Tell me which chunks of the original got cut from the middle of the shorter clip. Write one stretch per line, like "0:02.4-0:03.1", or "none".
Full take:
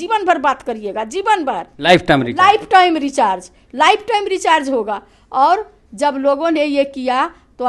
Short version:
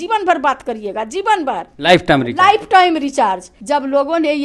0:03.5-0:05.8